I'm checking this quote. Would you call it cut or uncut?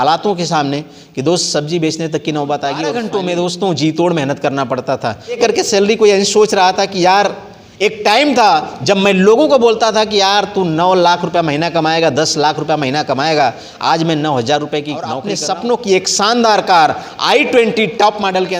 cut